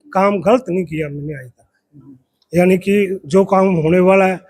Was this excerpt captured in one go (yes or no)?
yes